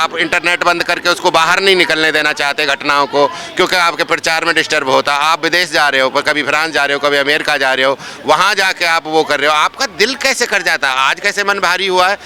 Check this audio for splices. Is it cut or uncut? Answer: uncut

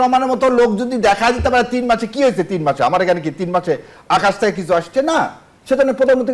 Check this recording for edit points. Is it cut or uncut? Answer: uncut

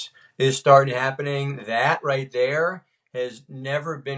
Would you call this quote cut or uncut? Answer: uncut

